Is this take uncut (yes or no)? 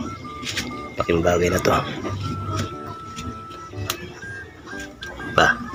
yes